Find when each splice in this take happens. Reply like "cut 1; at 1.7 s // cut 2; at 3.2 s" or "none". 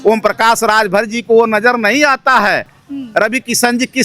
cut 1; at 2.8 s

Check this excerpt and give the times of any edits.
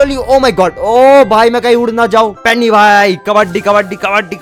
cut 1; at 2.4 s

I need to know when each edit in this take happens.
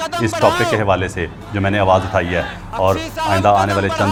none

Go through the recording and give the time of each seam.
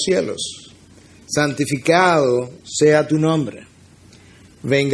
cut 1; at 3.2 s

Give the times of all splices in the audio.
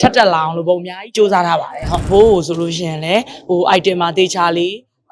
cut 1; at 1.9 s

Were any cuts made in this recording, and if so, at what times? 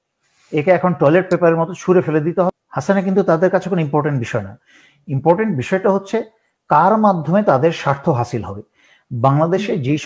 cut 1; at 2.6 s

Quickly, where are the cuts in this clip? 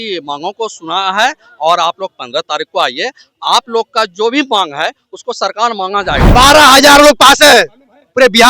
cut 1; at 6.3 s

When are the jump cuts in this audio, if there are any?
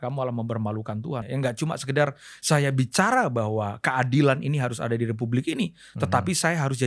cut 1; at 1.2 s

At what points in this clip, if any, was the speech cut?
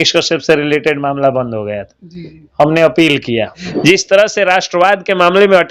cut 1; at 3.6 s

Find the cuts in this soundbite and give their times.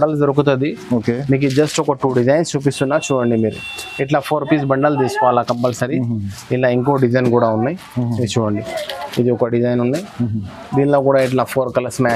none

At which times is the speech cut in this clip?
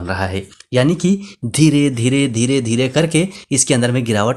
none

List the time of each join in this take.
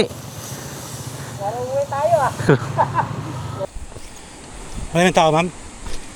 cut 1; at 3.6 s

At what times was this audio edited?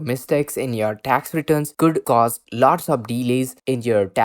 cut 1; at 1.8 s

